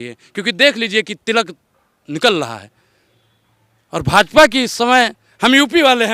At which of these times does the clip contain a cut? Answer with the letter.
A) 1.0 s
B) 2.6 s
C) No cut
C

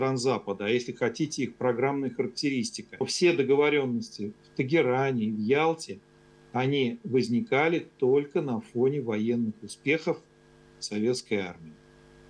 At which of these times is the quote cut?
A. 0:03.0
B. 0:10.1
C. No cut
A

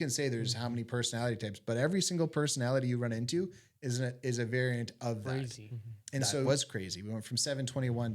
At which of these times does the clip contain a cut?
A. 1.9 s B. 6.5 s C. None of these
B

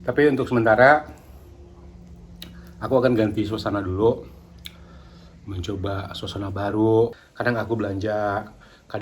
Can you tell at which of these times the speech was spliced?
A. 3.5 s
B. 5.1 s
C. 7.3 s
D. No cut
C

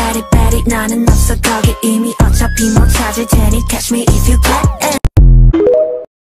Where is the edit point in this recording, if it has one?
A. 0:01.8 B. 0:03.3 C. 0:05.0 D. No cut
C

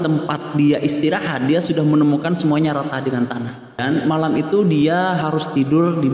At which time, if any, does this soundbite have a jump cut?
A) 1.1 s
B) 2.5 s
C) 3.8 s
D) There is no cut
C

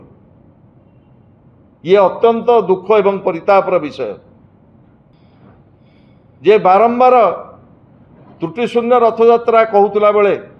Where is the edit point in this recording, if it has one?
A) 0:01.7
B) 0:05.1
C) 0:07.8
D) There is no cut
B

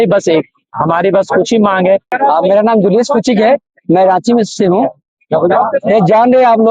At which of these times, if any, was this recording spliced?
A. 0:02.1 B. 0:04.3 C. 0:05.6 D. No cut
A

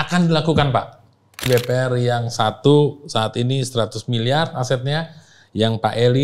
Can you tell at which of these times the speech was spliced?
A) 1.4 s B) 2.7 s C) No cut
A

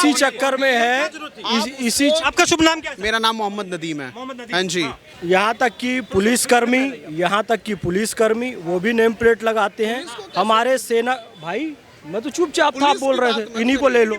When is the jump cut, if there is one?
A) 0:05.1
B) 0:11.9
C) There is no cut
A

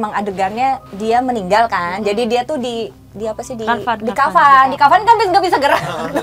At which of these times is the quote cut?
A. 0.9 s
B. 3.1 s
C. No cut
A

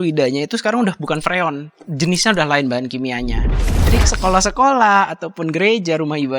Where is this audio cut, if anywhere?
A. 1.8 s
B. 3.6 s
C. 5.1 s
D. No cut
B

